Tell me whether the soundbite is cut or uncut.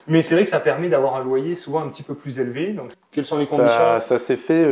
cut